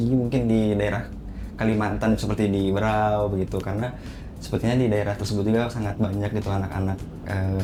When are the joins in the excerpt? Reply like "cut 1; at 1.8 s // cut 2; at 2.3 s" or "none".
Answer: none